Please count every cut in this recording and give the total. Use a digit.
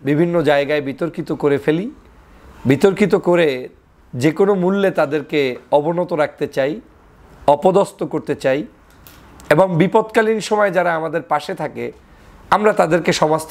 0